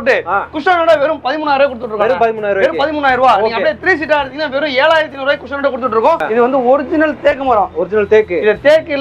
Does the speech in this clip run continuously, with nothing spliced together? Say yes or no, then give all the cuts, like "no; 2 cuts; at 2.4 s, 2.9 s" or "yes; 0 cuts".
no; 1 cut; at 6.2 s